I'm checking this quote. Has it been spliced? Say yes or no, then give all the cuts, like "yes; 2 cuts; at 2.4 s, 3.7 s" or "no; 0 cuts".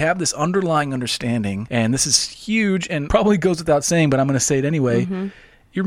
yes; 2 cuts; at 1.6 s, 3.0 s